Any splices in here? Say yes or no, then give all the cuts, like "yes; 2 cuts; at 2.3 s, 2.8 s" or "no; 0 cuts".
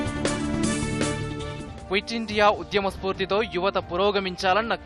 yes; 1 cut; at 1.3 s